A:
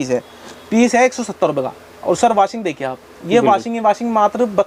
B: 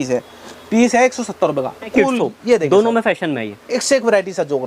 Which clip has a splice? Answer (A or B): B